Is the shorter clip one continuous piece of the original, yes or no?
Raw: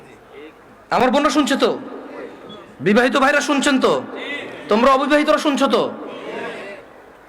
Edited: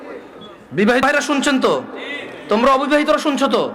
no